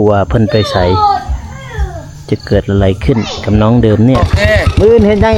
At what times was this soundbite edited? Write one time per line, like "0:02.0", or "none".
0:04.3